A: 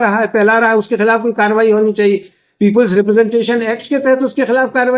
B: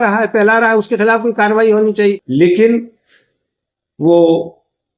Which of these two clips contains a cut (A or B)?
B